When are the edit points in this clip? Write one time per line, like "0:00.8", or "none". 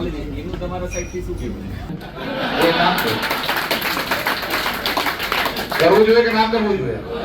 0:01.9